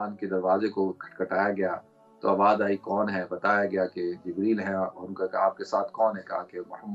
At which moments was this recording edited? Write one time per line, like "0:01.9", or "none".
none